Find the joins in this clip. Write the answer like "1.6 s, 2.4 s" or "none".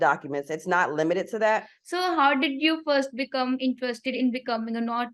1.8 s